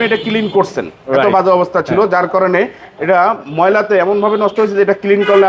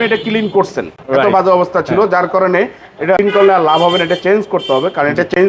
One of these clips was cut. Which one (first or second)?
second